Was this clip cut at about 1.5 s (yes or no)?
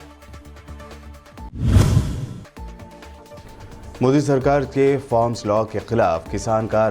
yes